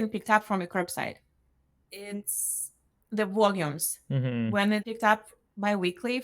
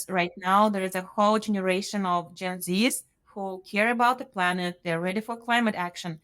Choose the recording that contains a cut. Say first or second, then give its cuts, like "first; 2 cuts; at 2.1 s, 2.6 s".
first; 1 cut; at 1.8 s